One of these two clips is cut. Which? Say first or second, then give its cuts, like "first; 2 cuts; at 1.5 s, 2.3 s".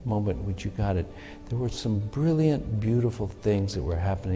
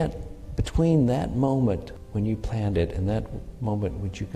second; 1 cut; at 2.0 s